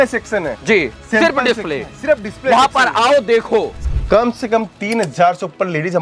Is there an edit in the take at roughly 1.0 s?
no; 1 cut; at 3.8 s

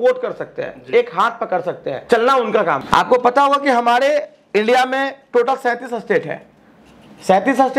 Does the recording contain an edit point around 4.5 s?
no; 2 cuts; at 1.9 s, 2.8 s

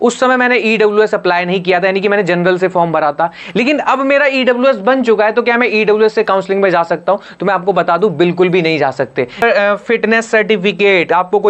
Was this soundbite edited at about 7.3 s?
no; 1 cut; at 9.4 s

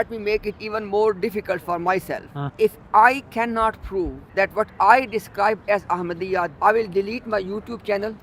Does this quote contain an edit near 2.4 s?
yes; 3 cuts; at 2.4 s, 4.2 s, 6.5 s

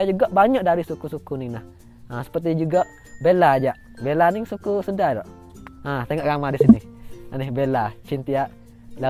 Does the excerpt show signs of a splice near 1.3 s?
no; 0 cuts

